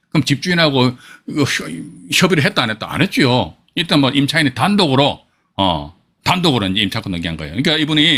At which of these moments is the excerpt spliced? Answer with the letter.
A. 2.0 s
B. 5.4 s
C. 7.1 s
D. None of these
D